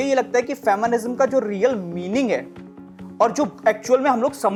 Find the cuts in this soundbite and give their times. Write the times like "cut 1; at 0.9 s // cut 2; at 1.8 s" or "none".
none